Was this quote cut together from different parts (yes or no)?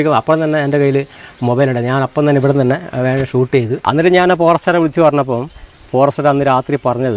yes